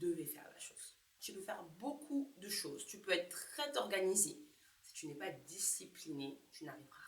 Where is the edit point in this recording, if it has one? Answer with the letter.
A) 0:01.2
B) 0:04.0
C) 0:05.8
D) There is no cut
A